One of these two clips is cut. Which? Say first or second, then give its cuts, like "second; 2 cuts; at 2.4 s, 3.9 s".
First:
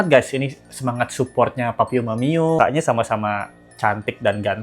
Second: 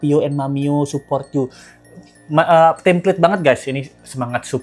first; 1 cut; at 2.6 s